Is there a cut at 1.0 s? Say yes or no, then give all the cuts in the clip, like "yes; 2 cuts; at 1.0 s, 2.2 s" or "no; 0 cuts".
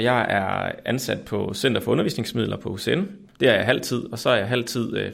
no; 1 cut; at 3.2 s